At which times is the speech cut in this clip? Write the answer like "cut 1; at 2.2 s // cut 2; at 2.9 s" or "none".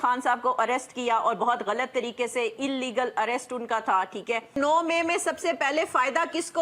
cut 1; at 4.5 s